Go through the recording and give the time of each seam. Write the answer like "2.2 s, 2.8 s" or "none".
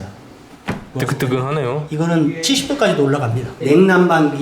0.9 s, 1.9 s, 3.5 s